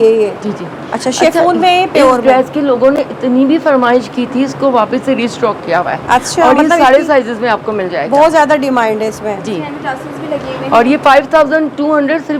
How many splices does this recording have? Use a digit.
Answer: 0